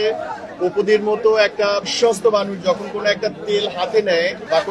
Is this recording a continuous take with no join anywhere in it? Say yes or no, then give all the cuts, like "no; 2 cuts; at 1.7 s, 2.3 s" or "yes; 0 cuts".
no; 1 cut; at 1.8 s